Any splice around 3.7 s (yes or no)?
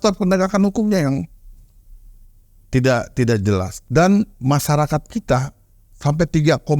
yes